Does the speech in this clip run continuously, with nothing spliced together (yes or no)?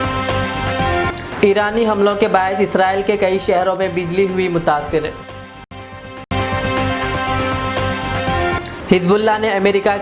yes